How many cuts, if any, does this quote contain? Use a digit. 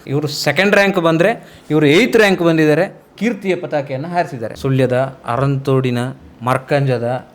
1